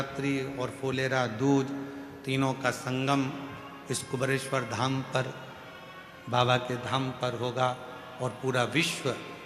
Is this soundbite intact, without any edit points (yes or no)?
yes